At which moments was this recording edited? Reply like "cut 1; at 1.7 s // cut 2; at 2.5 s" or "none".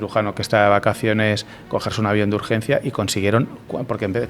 none